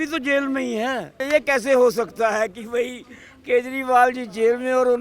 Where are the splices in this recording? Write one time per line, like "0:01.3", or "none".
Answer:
0:01.1